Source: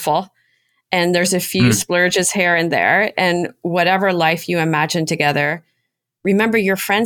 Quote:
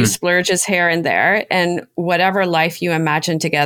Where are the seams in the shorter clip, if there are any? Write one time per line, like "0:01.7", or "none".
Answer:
none